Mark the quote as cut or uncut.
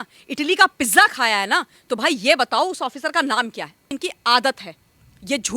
cut